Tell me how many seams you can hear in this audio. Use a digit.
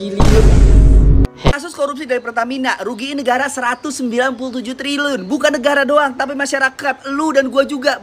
1